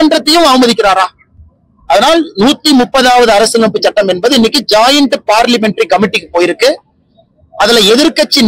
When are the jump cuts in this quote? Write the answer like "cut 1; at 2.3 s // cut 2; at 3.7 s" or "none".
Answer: none